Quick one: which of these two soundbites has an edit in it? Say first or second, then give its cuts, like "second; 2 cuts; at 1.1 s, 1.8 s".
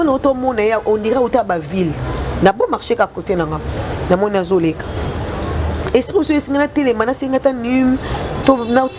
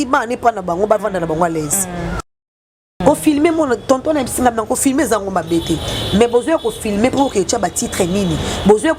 second; 1 cut; at 2.6 s